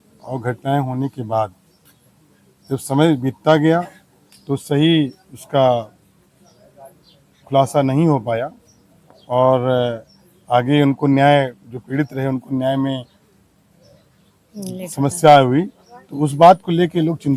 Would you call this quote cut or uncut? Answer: uncut